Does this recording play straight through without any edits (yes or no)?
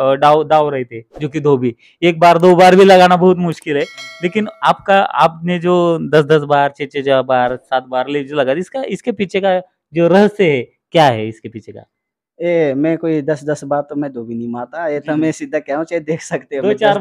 yes